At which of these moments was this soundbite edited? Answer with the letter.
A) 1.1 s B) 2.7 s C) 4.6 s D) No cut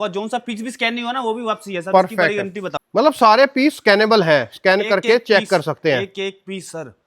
B